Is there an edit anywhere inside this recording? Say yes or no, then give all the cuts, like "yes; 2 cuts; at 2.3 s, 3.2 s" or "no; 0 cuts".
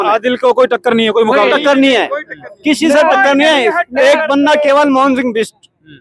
no; 0 cuts